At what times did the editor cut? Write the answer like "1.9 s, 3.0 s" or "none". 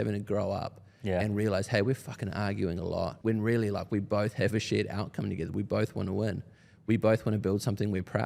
3.2 s